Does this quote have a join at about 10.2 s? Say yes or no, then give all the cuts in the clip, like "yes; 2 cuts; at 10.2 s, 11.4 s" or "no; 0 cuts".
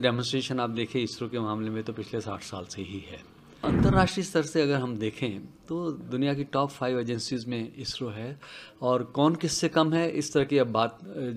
no; 1 cut; at 3.6 s